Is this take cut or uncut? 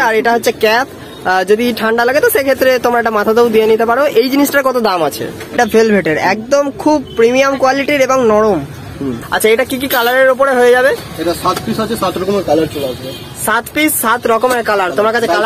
cut